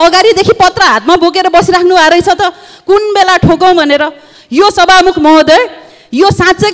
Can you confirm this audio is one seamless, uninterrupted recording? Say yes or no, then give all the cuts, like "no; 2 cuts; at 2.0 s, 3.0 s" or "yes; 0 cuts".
yes; 0 cuts